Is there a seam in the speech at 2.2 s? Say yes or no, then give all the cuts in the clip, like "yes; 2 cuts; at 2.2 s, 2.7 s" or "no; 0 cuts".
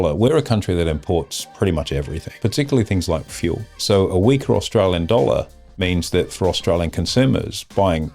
yes; 3 cuts; at 1.4 s, 2.2 s, 3.7 s